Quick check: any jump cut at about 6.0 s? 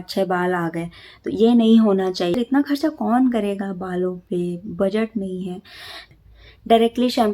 yes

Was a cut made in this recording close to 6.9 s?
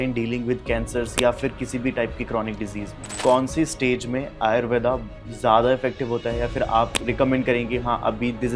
yes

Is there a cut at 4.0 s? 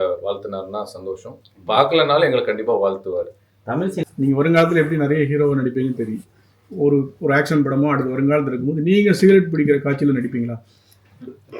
yes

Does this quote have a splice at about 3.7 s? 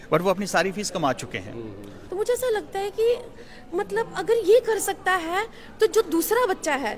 no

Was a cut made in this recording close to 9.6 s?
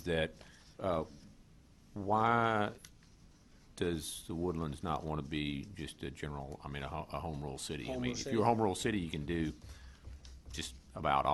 no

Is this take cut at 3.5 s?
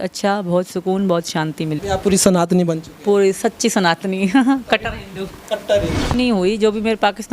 no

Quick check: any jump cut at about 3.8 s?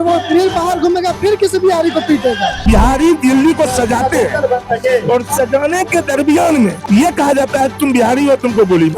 no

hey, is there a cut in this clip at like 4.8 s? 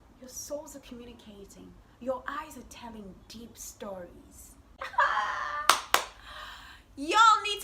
yes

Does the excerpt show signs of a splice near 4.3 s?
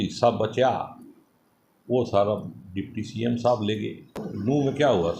yes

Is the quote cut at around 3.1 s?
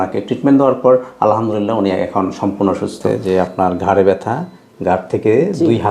yes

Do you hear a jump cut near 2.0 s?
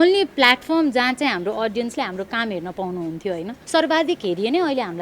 no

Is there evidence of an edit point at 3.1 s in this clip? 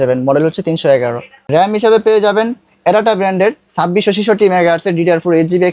no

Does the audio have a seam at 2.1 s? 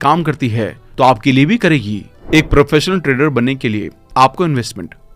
yes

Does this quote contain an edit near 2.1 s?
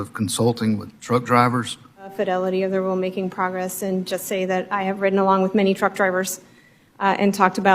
yes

